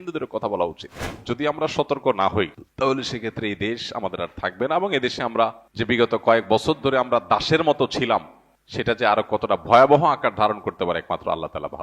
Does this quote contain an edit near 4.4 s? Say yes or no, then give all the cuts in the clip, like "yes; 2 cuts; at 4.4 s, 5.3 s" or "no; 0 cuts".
no; 2 cuts; at 1.1 s, 5.6 s